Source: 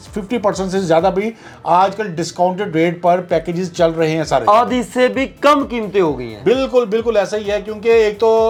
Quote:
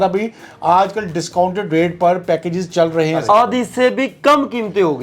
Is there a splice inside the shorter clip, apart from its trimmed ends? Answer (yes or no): yes